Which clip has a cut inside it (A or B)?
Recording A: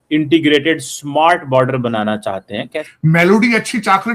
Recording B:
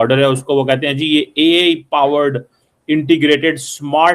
A